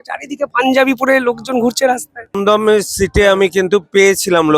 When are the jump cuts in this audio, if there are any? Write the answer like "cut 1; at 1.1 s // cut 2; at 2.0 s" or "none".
cut 1; at 2.4 s